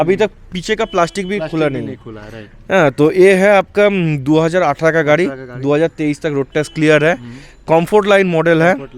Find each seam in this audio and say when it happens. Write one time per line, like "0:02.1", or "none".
none